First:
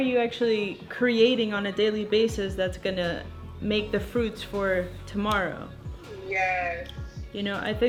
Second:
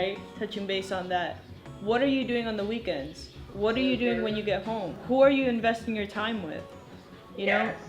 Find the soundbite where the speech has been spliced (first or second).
second